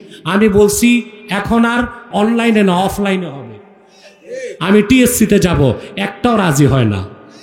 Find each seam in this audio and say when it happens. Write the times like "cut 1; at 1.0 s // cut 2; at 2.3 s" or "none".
cut 1; at 2.0 s